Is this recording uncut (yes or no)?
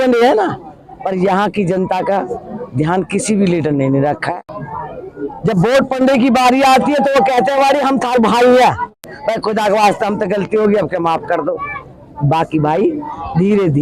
no